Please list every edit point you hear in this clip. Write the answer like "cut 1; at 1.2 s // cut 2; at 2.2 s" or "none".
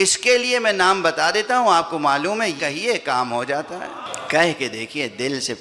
cut 1; at 2.6 s // cut 2; at 4.1 s